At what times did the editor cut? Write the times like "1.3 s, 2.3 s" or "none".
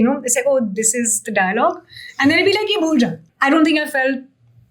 3.3 s